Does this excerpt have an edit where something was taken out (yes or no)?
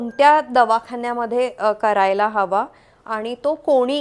no